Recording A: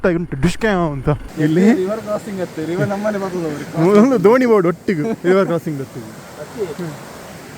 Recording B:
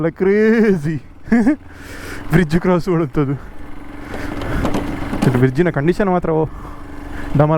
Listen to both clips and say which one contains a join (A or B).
A